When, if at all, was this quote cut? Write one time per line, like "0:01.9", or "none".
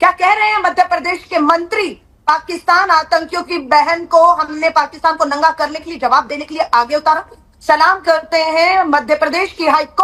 none